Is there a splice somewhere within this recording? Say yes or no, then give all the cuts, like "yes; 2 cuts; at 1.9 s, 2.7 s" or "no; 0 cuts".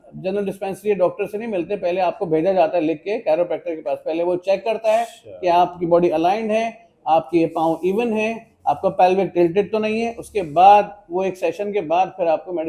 no; 0 cuts